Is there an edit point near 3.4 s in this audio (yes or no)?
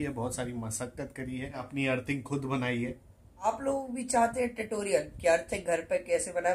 yes